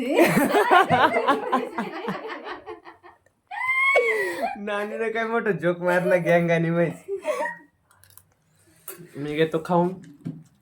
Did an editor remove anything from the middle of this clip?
no; 0 cuts

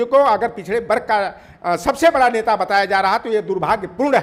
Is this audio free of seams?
yes; 0 cuts

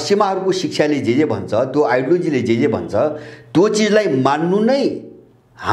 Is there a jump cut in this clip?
no; 0 cuts

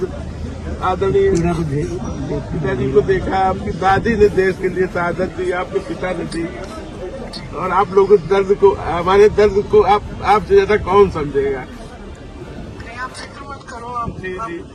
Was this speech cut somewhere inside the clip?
no; 0 cuts

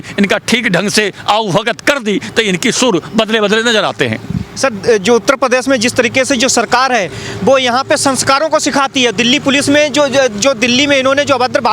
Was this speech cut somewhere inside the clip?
no; 0 cuts

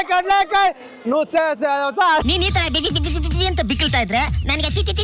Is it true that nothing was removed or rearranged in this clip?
yes; 0 cuts

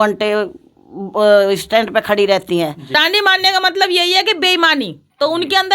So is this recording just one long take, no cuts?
no; 1 cut; at 2.9 s

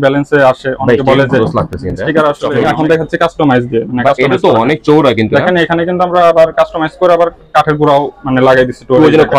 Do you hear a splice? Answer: yes; 1 cut; at 2.6 s

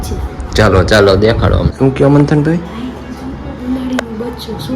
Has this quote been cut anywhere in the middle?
yes; 1 cut; at 1.7 s

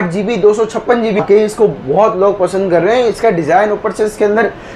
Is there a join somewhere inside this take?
yes; 1 cut; at 1.2 s

